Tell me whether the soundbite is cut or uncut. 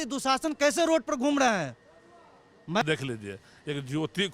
cut